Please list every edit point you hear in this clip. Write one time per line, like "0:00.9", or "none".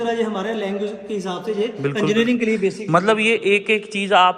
none